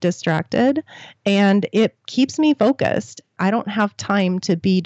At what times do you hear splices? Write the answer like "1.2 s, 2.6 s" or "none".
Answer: 3.3 s